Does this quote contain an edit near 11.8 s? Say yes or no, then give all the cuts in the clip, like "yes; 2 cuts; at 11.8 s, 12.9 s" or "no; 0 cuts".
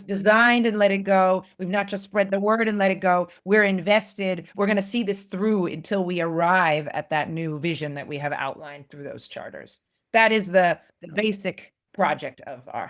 yes; 2 cuts; at 4.5 s, 11.8 s